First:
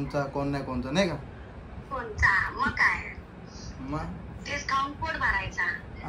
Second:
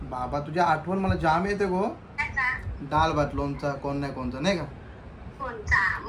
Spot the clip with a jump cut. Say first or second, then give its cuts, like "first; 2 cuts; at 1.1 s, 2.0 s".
second; 1 cut; at 2.2 s